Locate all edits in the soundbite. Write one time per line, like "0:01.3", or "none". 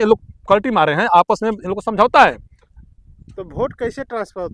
none